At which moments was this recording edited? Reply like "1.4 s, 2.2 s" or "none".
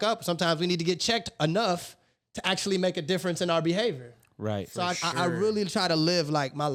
none